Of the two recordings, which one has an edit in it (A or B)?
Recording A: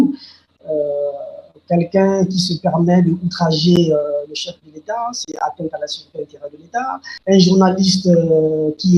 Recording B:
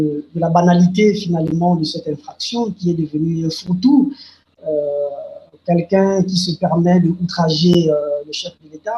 A